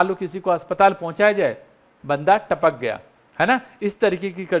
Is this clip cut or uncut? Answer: uncut